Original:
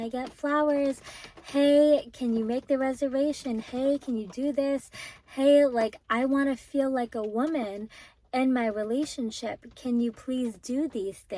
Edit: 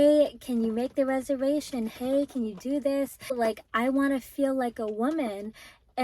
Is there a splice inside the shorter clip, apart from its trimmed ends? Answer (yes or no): yes